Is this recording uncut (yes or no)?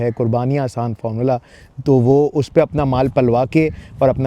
yes